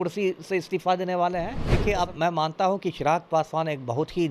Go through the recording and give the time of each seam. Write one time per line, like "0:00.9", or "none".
0:01.6

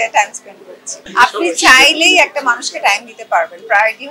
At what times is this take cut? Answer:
0:00.9

